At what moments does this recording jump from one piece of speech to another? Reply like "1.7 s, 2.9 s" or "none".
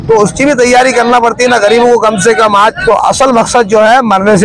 2.8 s